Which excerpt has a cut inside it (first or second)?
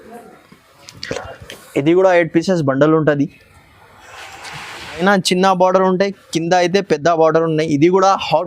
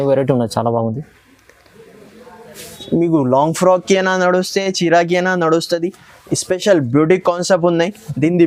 first